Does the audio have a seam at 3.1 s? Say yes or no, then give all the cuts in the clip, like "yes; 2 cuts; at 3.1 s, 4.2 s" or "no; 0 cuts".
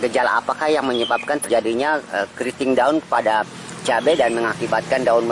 no; 1 cut; at 1.4 s